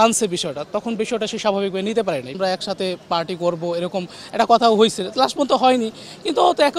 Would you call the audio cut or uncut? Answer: cut